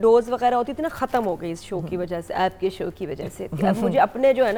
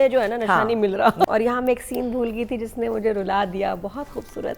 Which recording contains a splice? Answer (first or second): second